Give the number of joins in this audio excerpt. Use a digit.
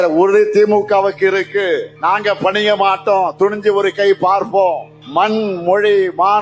2